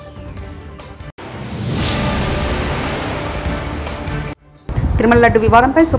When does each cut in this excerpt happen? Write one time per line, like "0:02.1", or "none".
0:01.1
0:04.5

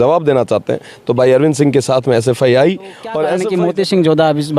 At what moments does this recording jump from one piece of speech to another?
0:03.3

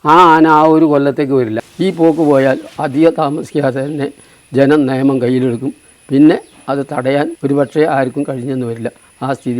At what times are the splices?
0:01.6
0:07.4

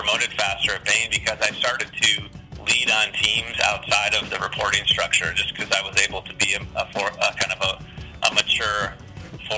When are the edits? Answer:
none

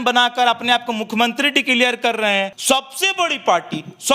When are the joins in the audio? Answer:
0:02.6

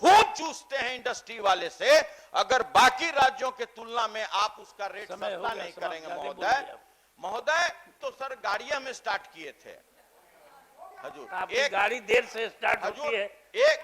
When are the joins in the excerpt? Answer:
0:07.9

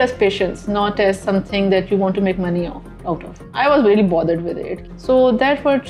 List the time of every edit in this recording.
0:03.4
0:04.8

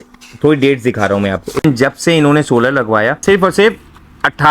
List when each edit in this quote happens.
0:01.5
0:03.2

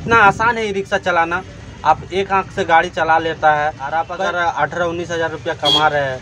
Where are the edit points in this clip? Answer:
0:03.8

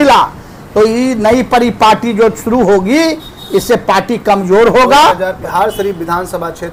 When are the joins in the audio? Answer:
none

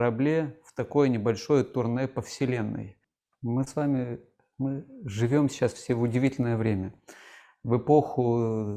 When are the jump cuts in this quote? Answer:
0:03.0

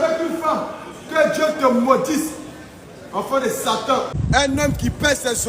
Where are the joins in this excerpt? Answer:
0:04.1

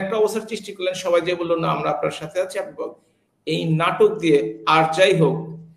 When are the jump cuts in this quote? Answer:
none

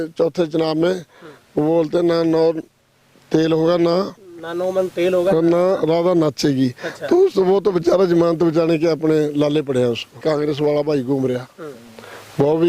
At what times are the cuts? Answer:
0:10.2

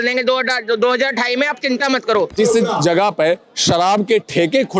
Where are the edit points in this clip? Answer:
0:02.3

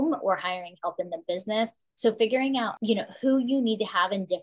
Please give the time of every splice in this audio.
0:01.8
0:02.8

